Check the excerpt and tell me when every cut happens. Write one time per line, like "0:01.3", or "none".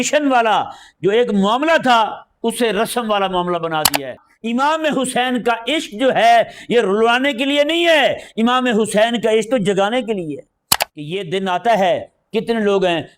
0:04.3
0:10.7

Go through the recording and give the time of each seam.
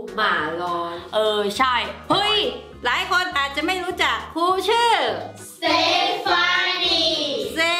0:02.7

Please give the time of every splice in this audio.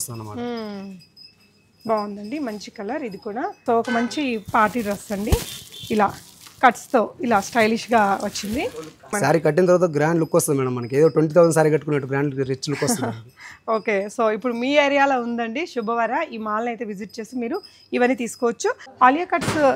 0:03.6
0:09.1
0:18.9

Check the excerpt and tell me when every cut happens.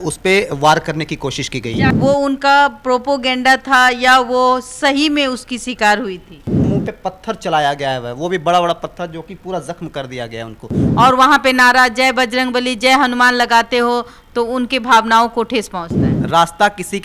0:01.8
0:06.7
0:10.8

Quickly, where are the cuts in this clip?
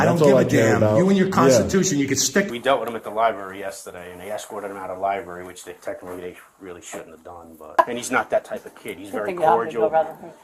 0:02.5
0:07.8

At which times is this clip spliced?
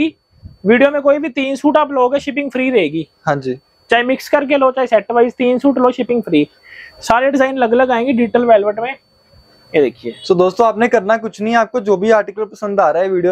none

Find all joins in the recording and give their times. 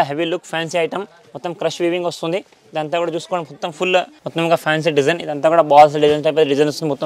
0:04.2

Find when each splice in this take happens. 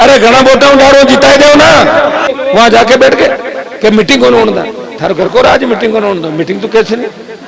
0:02.3

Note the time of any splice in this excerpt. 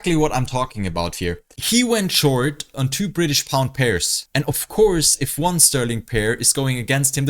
0:04.2

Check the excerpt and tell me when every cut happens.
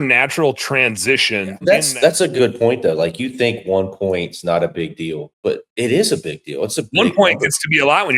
0:01.5

